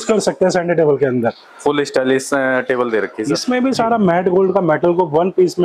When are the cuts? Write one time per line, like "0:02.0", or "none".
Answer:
0:03.3